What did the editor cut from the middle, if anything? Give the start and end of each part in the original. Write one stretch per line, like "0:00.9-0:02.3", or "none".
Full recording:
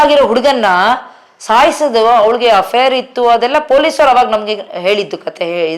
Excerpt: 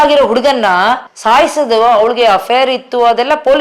0:01.1-0:01.3